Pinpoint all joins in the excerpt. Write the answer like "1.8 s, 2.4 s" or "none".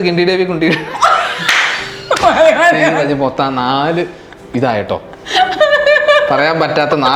none